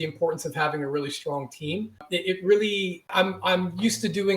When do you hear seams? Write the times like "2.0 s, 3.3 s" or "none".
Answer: 2.0 s, 3.0 s